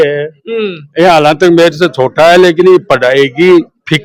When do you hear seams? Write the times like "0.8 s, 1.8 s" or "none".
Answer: none